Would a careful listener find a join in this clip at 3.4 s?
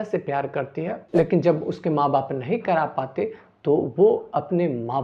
no; 1 cut; at 1.0 s

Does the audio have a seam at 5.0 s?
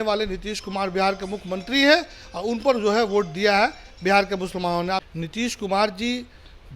yes; 1 cut; at 5.0 s

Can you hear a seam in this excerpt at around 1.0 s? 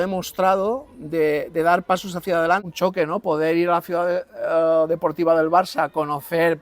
no; 1 cut; at 2.7 s

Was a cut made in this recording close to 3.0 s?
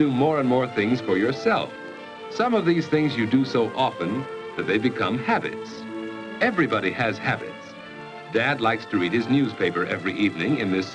no; 0 cuts

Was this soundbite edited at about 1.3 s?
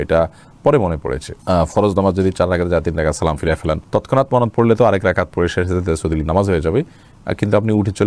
no; 0 cuts

